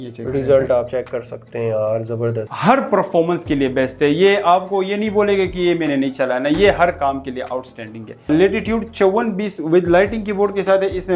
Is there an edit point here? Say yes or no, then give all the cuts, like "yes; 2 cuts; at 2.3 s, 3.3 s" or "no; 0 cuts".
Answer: yes; 2 cuts; at 2.5 s, 8.3 s